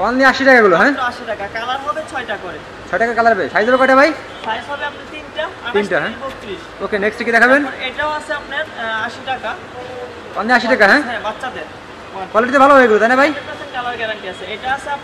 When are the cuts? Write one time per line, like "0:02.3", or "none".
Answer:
none